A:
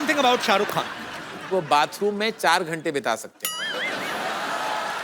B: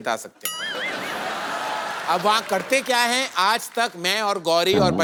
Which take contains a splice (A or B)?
A